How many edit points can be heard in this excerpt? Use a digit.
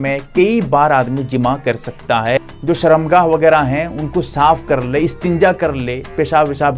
1